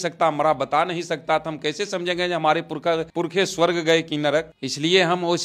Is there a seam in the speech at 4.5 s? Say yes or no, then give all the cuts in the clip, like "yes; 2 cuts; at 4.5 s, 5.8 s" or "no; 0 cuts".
no; 0 cuts